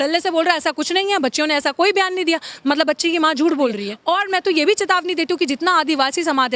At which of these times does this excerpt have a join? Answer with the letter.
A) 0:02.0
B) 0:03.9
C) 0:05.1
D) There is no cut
B